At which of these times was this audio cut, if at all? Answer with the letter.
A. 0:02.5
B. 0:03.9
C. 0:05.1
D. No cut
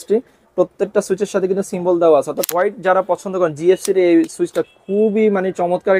A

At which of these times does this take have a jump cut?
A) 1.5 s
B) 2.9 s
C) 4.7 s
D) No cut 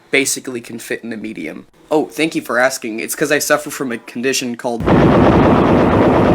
C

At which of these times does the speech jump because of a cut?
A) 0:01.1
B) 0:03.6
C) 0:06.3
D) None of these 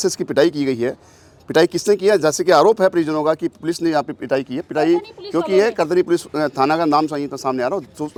D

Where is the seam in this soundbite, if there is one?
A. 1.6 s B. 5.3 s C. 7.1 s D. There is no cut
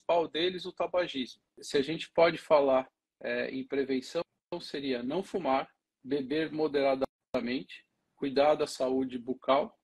A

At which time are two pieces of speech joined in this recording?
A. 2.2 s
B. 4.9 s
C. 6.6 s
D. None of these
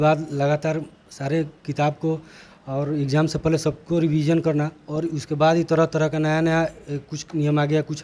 D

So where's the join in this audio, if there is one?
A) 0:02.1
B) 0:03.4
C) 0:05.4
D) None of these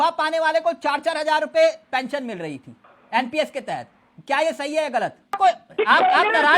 C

